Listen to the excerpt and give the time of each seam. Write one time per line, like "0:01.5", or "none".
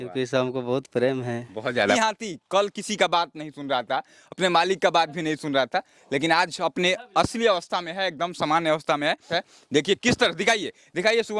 0:02.0
0:09.3